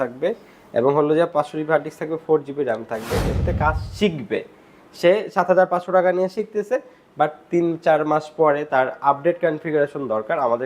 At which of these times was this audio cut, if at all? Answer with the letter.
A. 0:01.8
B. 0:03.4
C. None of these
B